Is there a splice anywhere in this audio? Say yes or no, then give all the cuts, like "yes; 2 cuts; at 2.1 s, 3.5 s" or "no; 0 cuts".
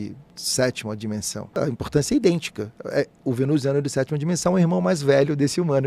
yes; 1 cut; at 1.6 s